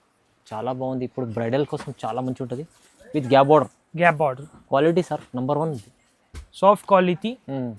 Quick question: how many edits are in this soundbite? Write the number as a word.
zero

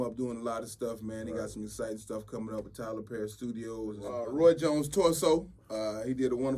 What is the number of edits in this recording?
one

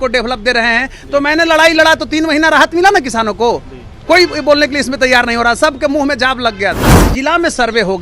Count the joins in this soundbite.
one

